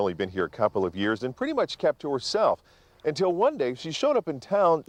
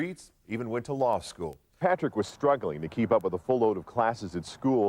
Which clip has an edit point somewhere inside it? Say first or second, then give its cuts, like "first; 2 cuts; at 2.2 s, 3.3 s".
second; 1 cut; at 1.7 s